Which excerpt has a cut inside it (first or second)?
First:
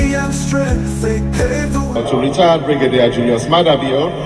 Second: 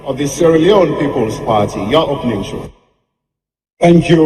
first